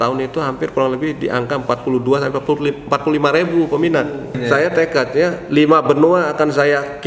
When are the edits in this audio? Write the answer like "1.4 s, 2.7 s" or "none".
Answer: 4.4 s